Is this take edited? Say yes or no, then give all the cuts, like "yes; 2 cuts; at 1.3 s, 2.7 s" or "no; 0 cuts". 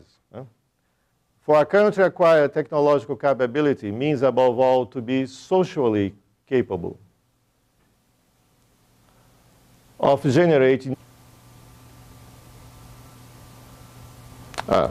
no; 0 cuts